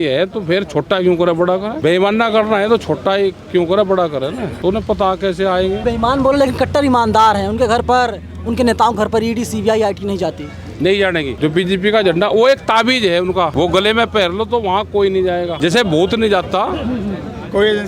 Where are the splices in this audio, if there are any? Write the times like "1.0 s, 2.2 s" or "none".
1.8 s, 4.5 s, 5.8 s, 11.3 s, 13.5 s, 15.6 s

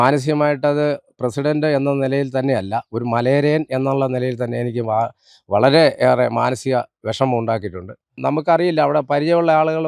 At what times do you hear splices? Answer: 8.1 s

